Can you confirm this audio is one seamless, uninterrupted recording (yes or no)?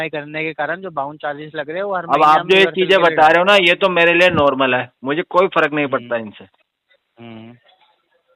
yes